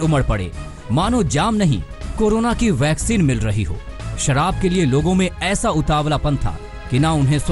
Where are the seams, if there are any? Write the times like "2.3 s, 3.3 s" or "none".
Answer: none